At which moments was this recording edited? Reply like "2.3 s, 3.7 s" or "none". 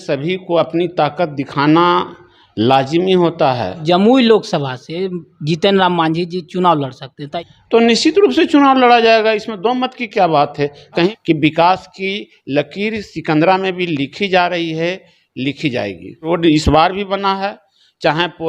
3.8 s, 7.3 s, 11.1 s, 16.2 s